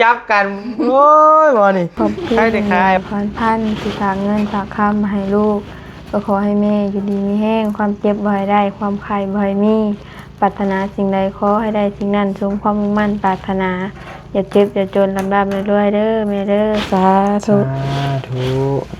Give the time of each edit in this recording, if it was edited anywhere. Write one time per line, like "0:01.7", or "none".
0:03.0